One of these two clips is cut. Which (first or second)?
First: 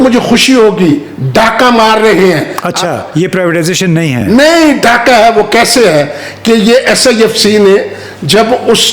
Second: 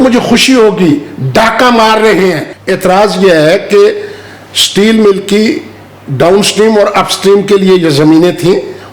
second